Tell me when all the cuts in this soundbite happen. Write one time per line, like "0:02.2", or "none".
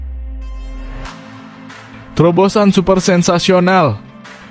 0:02.1